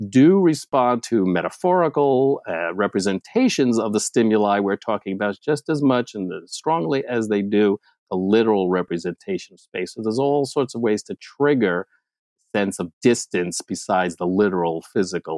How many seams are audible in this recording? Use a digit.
0